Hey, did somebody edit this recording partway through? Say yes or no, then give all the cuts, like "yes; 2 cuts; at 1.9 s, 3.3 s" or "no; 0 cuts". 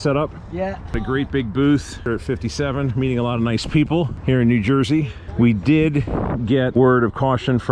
yes; 5 cuts; at 1.0 s, 2.1 s, 4.2 s, 5.2 s, 6.7 s